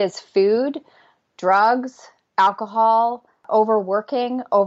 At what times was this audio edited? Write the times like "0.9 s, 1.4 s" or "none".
3.4 s